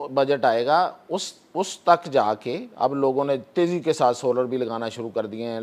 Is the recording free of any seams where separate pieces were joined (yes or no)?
yes